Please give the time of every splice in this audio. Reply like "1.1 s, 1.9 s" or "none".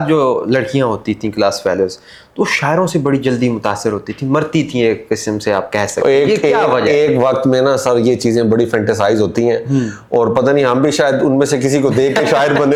none